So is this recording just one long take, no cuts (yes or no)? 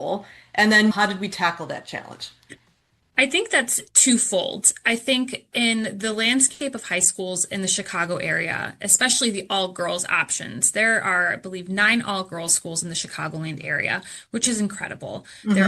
no